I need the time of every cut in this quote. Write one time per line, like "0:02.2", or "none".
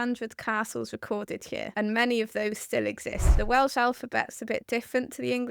0:01.7
0:03.3